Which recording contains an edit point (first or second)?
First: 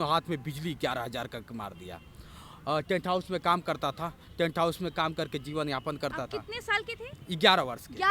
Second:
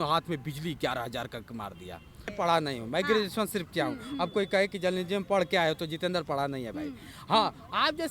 second